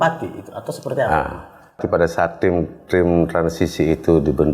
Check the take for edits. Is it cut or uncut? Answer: cut